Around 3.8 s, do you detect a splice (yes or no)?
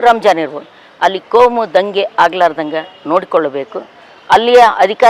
no